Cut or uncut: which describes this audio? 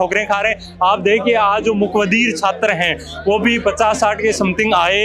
uncut